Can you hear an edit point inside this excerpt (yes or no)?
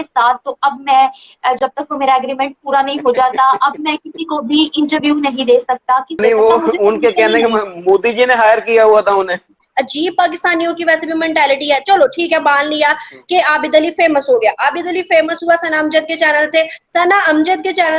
yes